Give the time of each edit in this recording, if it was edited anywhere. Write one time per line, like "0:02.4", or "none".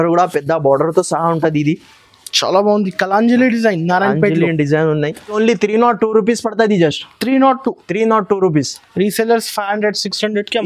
0:05.4